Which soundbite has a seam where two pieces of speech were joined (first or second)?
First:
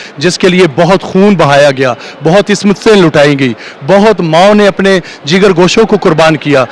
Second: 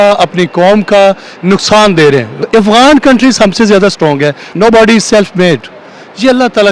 second